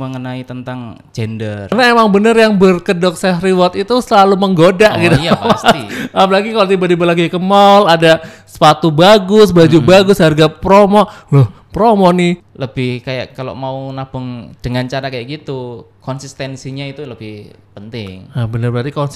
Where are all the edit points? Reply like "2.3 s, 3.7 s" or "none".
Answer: 1.7 s, 12.5 s

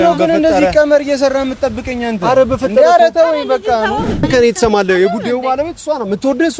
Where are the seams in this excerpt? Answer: 4.2 s

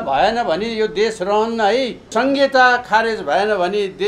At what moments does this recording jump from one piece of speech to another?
2.1 s

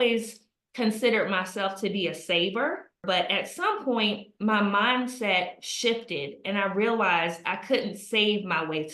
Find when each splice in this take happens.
3.0 s

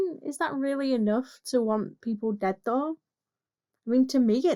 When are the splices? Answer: none

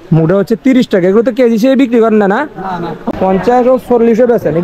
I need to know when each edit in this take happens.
3.0 s

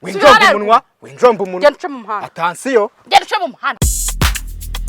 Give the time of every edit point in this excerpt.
3.6 s

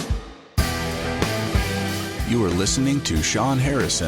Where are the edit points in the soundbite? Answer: 0.9 s

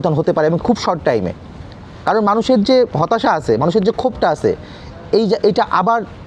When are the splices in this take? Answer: none

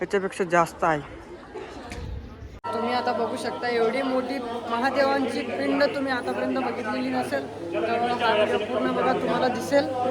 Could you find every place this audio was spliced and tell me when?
2.6 s

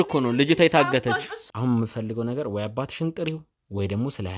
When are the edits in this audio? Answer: 1.3 s

